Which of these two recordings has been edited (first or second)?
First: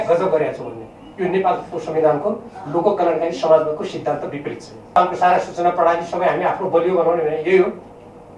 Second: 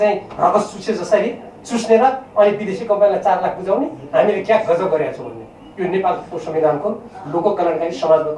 first